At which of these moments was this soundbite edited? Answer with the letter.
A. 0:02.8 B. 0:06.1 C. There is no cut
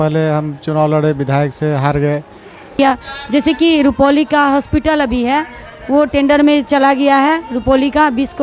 A